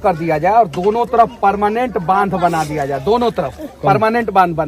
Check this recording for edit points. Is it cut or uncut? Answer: uncut